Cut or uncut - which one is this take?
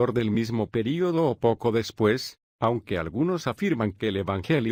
uncut